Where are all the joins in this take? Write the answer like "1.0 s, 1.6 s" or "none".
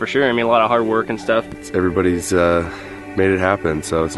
1.5 s